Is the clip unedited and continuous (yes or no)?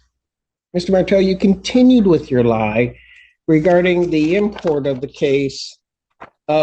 yes